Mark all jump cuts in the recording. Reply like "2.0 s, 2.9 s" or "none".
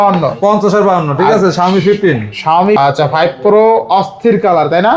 2.7 s